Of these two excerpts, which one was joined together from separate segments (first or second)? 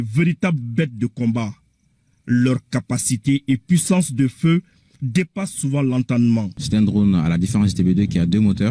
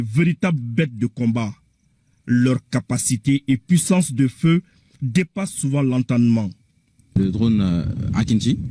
first